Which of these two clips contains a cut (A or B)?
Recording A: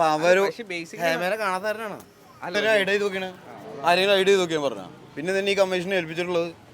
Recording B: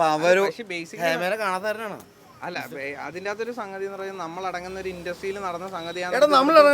A